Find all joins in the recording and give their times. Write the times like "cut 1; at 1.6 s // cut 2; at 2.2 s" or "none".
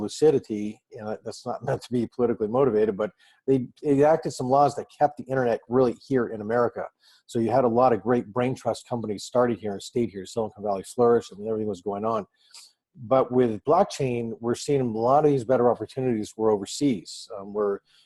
none